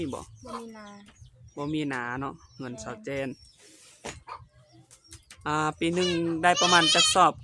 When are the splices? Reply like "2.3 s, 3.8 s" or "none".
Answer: none